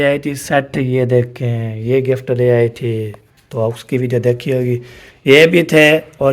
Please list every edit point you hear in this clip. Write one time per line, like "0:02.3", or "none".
none